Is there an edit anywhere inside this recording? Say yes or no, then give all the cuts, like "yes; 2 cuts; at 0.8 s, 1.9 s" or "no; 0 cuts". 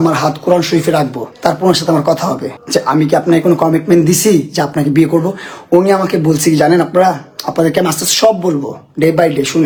no; 0 cuts